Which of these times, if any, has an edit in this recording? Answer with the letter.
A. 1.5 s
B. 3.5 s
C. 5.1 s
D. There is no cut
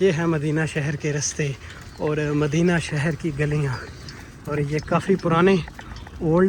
D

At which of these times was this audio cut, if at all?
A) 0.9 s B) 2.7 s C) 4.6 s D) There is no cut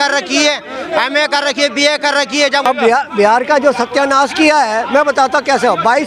B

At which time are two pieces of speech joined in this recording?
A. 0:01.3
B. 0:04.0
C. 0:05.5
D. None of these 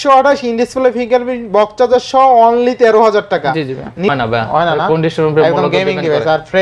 B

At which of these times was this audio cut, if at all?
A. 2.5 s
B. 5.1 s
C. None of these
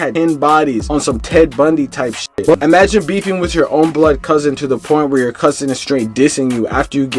A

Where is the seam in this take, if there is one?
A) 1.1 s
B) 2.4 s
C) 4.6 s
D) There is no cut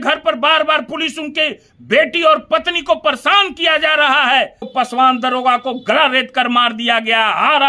C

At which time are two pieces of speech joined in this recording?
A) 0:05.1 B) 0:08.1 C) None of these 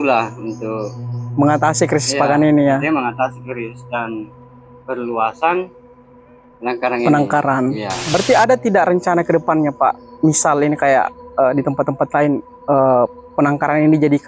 B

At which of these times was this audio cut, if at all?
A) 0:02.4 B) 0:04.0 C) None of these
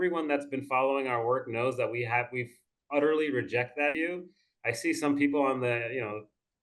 B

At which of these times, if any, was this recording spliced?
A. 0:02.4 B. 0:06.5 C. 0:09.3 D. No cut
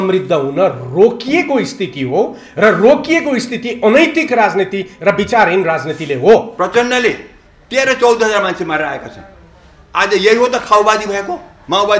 B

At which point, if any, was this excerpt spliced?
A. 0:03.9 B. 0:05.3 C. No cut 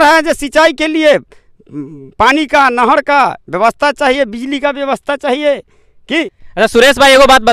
C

